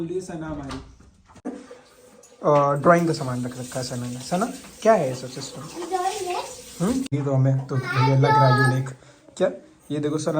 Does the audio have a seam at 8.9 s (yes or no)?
no